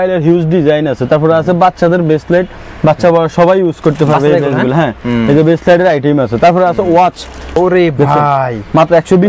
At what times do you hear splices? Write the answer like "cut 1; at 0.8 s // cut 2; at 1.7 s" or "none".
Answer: cut 1; at 7.5 s